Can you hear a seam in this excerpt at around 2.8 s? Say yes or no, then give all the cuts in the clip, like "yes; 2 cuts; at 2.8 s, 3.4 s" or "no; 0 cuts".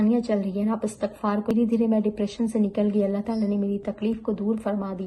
no; 1 cut; at 1.5 s